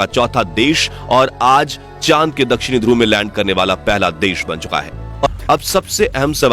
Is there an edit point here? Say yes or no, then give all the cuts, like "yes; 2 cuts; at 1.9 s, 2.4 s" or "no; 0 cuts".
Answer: yes; 1 cut; at 5.3 s